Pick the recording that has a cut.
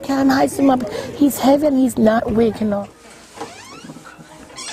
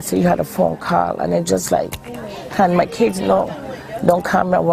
first; 1 cut; at 2.8 s

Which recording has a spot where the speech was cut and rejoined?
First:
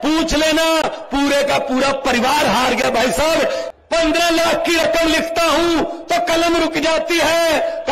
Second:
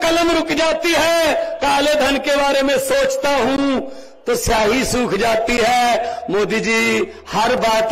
first; 1 cut; at 3.7 s

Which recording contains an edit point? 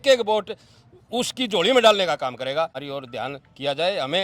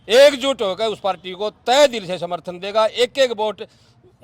first; 1 cut; at 2.8 s

